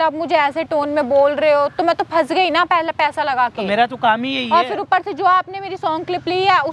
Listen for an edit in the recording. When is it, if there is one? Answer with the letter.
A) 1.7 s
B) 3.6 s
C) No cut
C